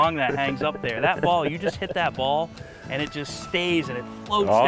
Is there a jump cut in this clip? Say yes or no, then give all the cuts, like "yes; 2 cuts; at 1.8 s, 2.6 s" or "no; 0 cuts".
no; 0 cuts